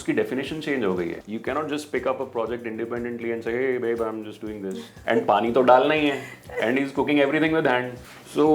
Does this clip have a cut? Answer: yes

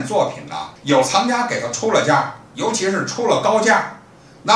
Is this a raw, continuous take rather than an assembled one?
yes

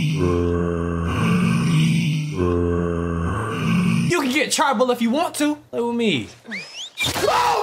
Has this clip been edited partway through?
yes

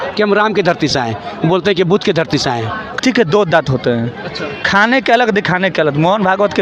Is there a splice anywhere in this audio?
yes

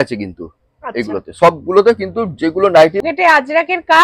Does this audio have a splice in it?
yes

